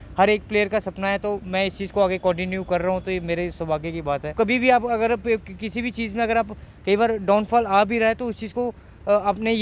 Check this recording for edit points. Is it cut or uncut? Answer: cut